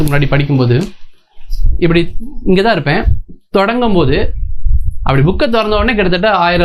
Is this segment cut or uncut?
uncut